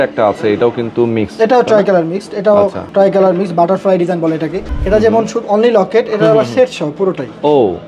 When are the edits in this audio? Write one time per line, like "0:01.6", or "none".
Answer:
0:02.8
0:04.7